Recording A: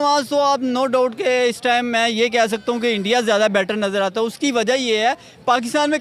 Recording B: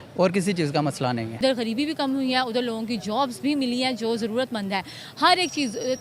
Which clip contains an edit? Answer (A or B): B